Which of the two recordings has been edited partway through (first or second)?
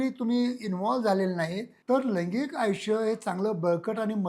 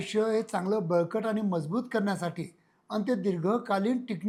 first